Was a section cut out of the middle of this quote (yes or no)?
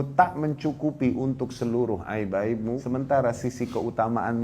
yes